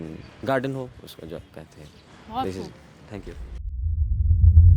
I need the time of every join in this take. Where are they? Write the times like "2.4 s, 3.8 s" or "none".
3.7 s